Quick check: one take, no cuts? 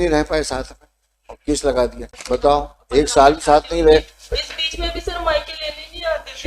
no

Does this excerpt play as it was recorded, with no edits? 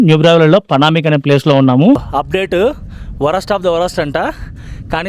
no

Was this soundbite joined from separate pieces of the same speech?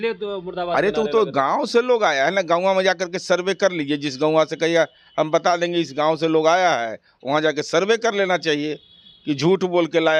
no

